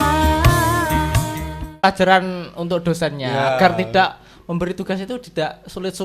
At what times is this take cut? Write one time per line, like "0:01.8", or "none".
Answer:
0:01.8